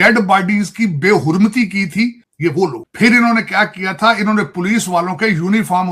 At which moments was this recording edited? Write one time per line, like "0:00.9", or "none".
0:02.3